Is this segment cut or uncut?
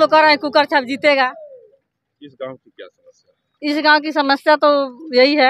uncut